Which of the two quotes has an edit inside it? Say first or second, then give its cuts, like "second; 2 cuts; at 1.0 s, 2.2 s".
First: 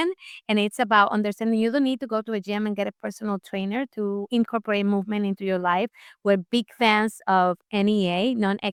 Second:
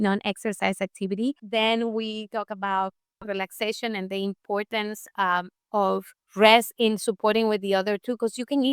second; 2 cuts; at 1.4 s, 6.2 s